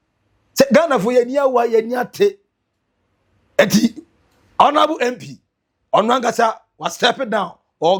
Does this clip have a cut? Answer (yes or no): no